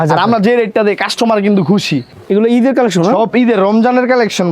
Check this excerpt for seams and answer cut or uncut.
cut